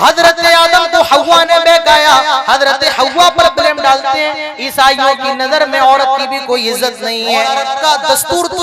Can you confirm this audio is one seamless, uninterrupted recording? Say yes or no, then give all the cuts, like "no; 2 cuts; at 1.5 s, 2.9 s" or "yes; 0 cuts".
no; 1 cut; at 7.2 s